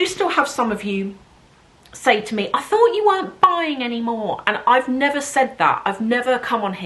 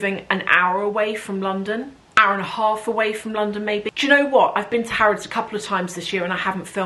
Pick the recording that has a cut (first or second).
second